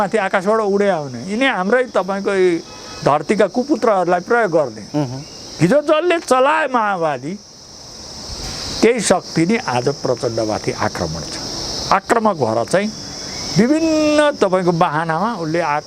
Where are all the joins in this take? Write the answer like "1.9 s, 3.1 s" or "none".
none